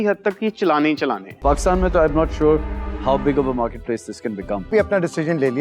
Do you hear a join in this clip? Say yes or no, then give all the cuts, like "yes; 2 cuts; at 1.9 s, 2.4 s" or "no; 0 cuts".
yes; 2 cuts; at 1.4 s, 4.7 s